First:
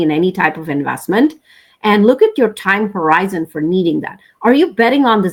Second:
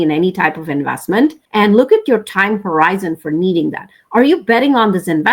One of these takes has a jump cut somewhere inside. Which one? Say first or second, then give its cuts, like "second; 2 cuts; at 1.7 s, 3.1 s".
second; 1 cut; at 1.4 s